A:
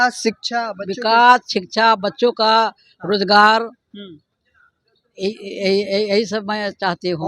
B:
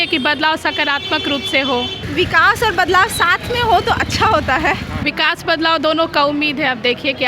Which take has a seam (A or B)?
B